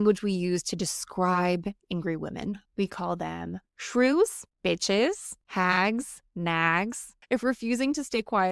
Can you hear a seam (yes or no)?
yes